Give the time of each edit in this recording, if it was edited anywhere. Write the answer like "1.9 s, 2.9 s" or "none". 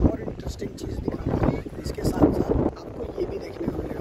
none